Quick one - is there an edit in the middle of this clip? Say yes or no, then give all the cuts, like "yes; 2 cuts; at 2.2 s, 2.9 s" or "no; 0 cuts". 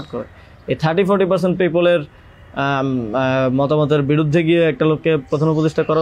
no; 0 cuts